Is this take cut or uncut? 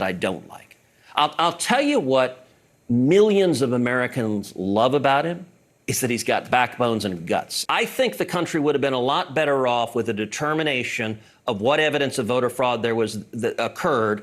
cut